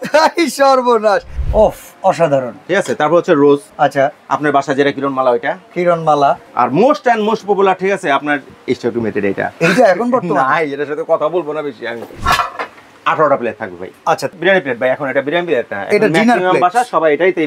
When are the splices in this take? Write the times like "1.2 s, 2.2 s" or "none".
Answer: 1.3 s, 3.7 s, 6.5 s, 8.5 s, 12.1 s, 14.3 s